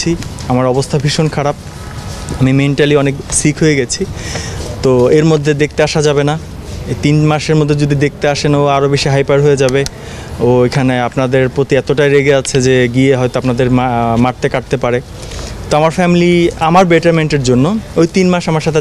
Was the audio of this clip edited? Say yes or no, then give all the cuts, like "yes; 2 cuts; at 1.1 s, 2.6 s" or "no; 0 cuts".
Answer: no; 0 cuts